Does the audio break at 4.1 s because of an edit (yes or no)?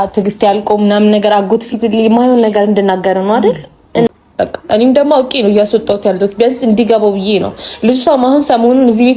yes